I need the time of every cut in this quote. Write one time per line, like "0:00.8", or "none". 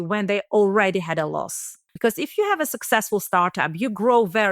0:01.9

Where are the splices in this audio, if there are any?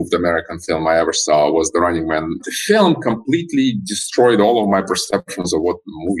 0:02.4

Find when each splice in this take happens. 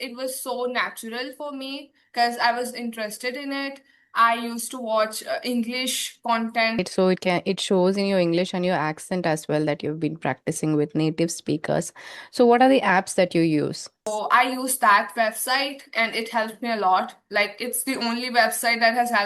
0:06.8
0:14.1

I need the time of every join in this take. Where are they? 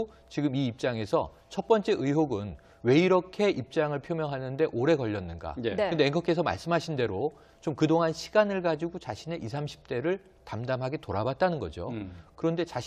0:03.1

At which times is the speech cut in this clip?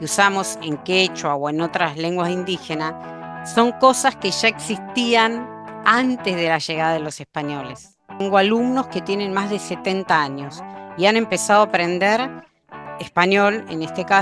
0:08.2

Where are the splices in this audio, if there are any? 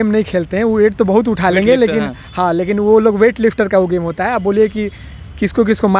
none

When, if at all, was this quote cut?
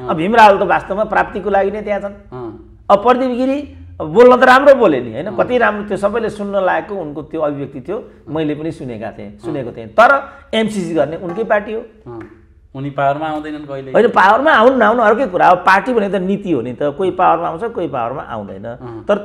none

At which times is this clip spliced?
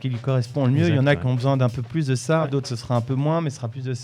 0:02.5

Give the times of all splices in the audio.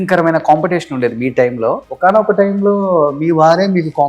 0:01.9

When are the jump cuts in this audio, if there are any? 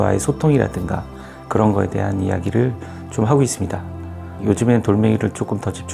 0:04.4

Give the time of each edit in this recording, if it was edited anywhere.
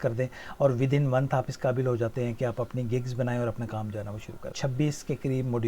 0:04.5

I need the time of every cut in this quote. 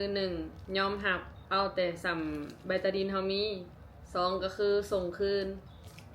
0:01.3

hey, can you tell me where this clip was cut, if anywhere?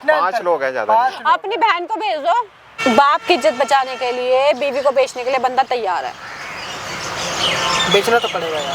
0:02.6

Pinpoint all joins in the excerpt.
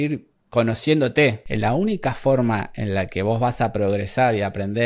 0:01.5

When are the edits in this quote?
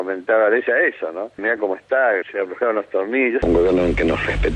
0:01.4
0:03.4

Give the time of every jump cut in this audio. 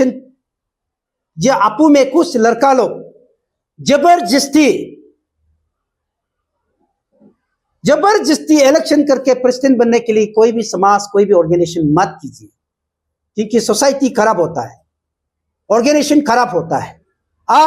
none

